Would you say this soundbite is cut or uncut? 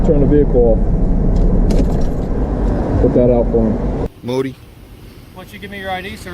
cut